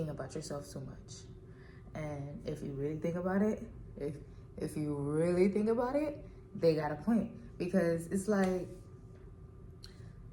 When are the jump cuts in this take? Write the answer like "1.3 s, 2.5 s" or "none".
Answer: none